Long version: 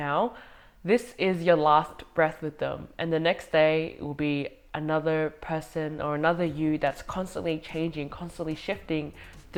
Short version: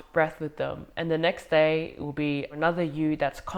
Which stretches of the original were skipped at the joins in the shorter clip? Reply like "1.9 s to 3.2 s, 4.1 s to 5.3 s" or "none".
4.6 s to 6.2 s